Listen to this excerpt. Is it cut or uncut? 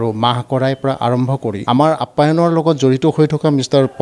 cut